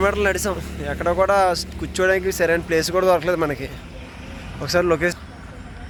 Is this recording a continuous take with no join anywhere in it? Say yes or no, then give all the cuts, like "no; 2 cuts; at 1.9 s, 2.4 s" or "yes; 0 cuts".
yes; 0 cuts